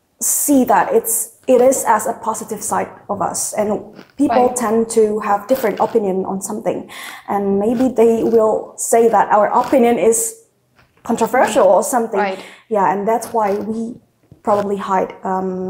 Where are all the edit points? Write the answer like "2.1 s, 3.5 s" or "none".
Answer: none